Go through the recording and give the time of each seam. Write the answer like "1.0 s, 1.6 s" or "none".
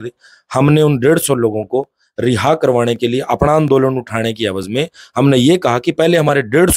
none